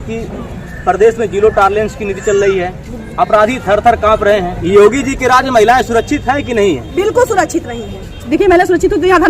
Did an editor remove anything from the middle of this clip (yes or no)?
yes